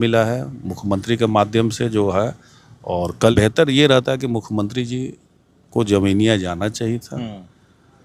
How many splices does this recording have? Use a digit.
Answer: 1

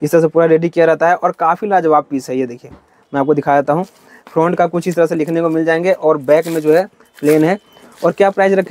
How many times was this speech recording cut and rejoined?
0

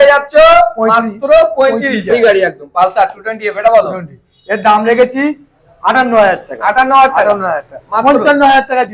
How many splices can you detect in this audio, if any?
1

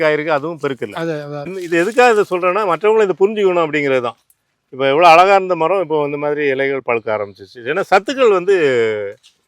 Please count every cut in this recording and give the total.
1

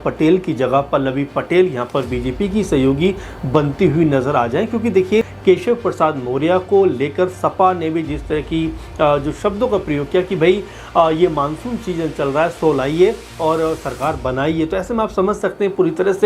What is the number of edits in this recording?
1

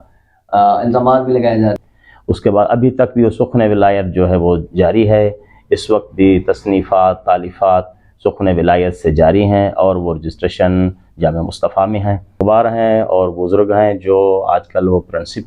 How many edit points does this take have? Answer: 2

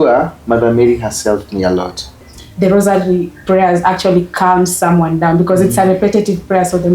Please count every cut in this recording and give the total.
1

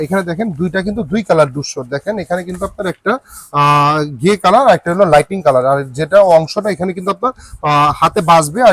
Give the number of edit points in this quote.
0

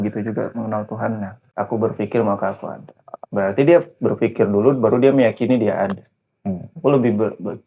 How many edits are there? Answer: 1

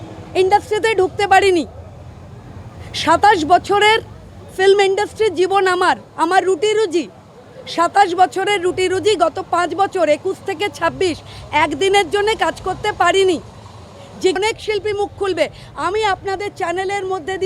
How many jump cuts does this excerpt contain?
1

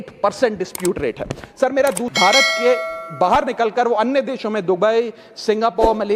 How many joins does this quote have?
1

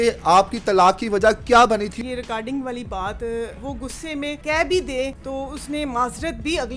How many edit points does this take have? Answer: 3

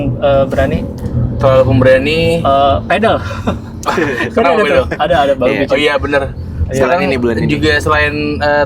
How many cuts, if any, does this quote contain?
0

